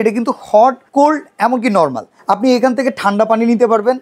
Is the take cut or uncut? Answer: uncut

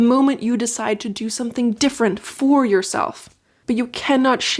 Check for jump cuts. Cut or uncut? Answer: uncut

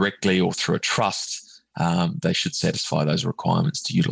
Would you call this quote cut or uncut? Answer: uncut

